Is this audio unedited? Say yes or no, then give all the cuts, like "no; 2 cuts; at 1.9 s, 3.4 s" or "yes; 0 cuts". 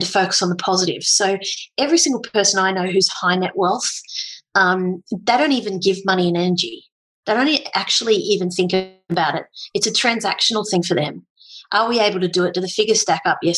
yes; 0 cuts